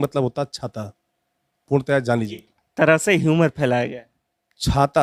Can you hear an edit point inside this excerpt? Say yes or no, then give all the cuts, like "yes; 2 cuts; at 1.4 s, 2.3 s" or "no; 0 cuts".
no; 0 cuts